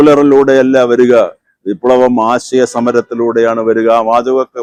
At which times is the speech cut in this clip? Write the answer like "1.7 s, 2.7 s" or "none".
none